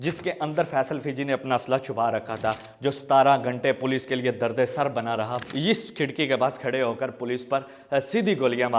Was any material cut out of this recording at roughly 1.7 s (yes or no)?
no